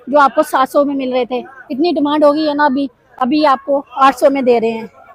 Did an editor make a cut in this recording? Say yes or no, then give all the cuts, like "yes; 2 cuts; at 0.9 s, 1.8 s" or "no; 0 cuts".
no; 0 cuts